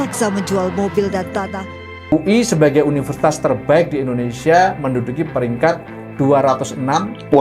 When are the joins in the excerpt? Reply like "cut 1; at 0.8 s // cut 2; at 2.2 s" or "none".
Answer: cut 1; at 2.1 s

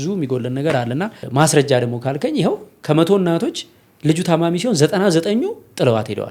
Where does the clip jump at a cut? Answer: cut 1; at 1.2 s

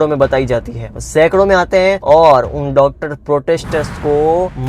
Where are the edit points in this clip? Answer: none

